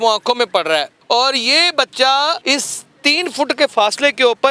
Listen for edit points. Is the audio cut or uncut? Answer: cut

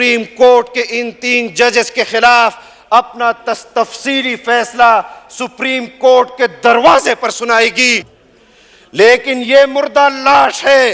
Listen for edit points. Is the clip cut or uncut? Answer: cut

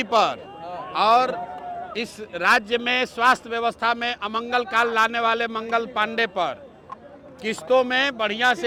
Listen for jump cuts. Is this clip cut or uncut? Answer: uncut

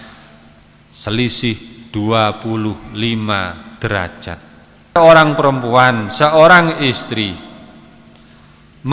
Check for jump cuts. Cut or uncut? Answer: cut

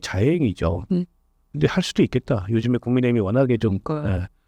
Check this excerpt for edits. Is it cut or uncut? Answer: uncut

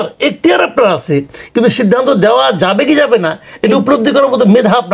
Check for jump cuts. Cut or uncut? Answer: uncut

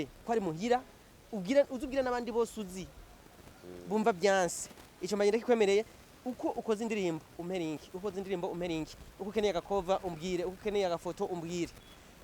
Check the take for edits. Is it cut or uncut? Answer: uncut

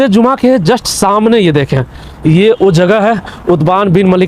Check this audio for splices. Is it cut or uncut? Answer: uncut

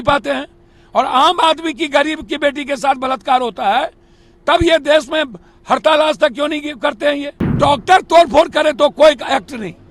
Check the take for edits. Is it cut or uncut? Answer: cut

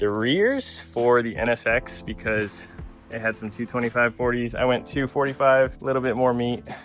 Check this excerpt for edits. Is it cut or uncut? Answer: uncut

